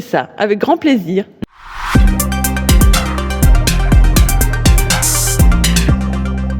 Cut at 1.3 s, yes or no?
yes